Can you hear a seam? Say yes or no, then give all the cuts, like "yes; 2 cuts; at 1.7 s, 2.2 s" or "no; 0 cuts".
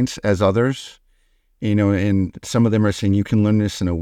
no; 0 cuts